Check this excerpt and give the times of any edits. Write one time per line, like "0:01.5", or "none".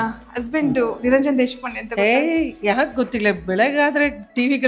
none